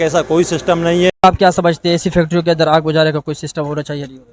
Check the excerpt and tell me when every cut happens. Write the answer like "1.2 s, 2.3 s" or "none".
1.2 s